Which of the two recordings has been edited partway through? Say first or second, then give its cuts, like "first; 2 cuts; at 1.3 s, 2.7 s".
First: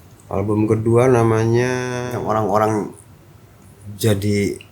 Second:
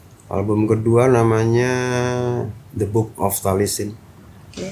first; 1 cut; at 2.0 s